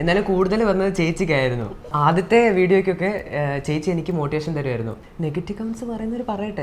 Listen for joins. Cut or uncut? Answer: cut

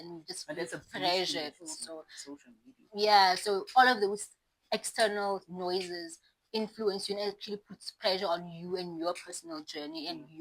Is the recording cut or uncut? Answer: uncut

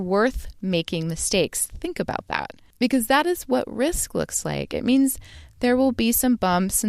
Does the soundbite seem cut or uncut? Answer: cut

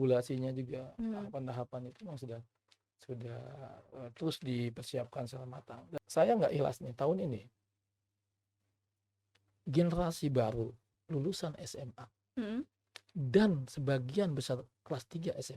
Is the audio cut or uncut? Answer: cut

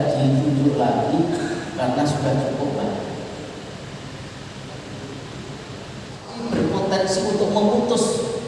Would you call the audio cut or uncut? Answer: cut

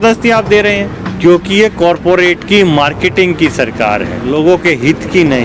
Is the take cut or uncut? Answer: cut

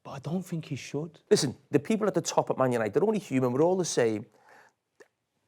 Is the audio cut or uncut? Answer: cut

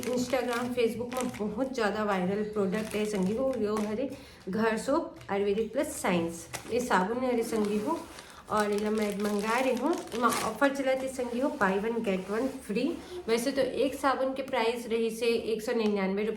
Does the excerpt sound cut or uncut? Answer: uncut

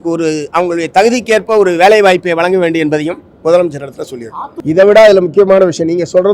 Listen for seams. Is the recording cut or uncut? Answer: cut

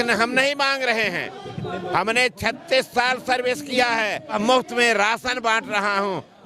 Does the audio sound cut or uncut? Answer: cut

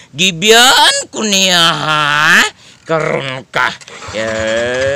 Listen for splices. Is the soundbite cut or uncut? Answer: uncut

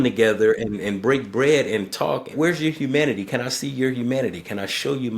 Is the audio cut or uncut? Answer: cut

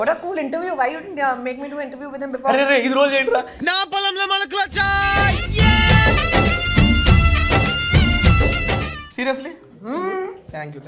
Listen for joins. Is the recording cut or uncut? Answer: uncut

